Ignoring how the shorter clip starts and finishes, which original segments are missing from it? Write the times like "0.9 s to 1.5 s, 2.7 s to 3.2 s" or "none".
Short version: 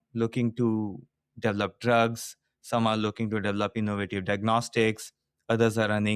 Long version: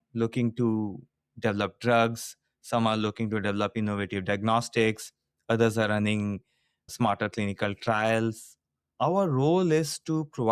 none